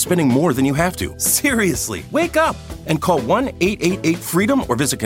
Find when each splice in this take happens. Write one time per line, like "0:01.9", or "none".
0:01.6